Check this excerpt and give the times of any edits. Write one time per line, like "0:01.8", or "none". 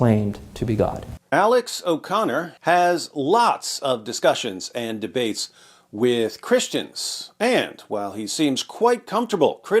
0:01.1
0:02.5